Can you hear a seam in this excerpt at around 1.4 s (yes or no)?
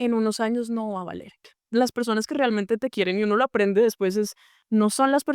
yes